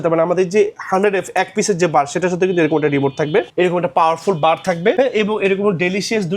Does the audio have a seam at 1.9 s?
no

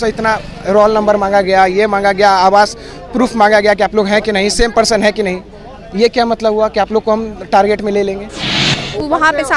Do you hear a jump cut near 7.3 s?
no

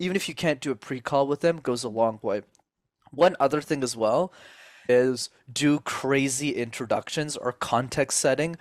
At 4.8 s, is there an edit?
yes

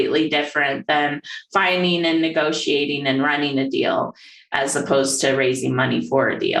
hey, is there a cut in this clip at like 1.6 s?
no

